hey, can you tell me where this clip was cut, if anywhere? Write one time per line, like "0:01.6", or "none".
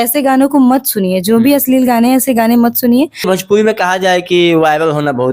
0:03.3